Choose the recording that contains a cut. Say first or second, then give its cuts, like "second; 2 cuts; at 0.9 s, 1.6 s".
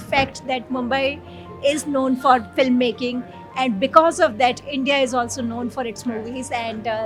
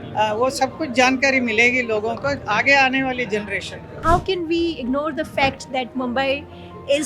second; 1 cut; at 3.9 s